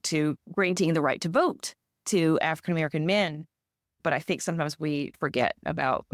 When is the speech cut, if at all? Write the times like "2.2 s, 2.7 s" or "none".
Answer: 4.0 s